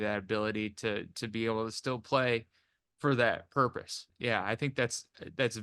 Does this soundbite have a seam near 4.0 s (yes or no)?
yes